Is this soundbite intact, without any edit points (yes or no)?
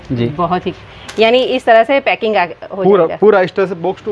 yes